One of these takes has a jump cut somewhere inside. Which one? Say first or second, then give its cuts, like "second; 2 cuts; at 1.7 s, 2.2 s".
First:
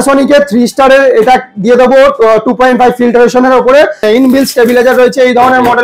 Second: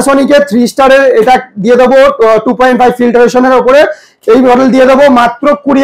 first; 1 cut; at 4.0 s